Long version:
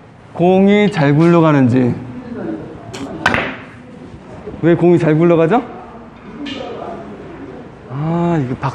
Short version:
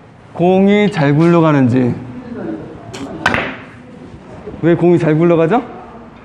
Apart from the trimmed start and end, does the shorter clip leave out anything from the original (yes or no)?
no